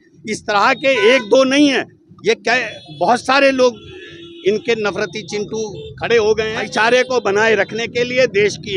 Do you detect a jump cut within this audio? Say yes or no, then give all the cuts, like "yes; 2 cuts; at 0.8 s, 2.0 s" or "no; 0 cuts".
yes; 1 cut; at 6.7 s